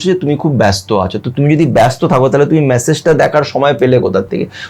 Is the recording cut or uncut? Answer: uncut